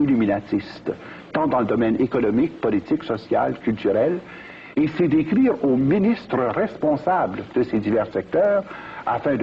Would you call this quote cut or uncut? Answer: cut